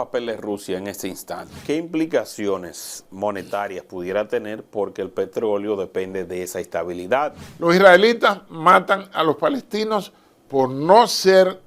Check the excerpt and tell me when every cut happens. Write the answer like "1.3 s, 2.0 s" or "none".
1.6 s, 7.4 s